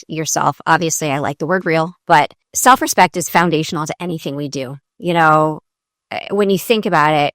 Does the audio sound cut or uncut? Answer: cut